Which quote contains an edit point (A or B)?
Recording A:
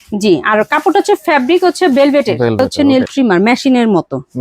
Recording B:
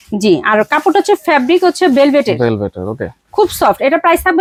A